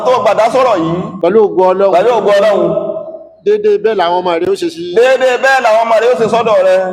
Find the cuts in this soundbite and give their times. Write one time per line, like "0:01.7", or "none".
0:01.1